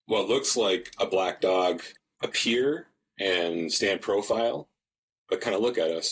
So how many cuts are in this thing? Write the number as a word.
one